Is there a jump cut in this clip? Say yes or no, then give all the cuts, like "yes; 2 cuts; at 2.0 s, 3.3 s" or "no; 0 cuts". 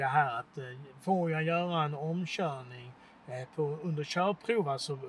no; 0 cuts